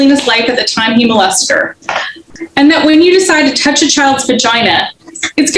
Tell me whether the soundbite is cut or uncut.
cut